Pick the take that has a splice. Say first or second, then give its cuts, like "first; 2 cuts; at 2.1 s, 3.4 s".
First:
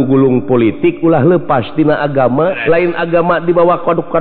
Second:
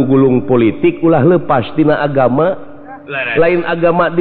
first; 1 cut; at 2.6 s